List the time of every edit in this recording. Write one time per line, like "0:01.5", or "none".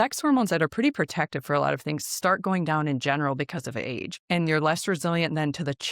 0:04.2

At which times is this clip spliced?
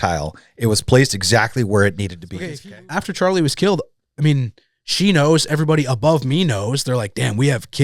0:02.2

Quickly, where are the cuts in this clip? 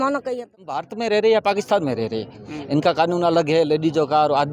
0:00.9

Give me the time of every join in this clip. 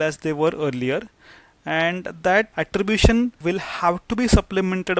0:02.5
0:03.4

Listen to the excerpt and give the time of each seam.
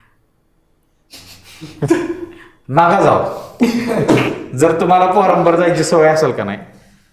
none

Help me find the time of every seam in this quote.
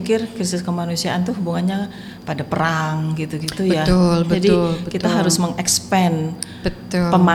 none

